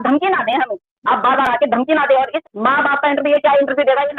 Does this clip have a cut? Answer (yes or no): yes